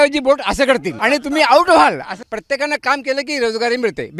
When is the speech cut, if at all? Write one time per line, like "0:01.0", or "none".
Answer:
0:00.9
0:02.2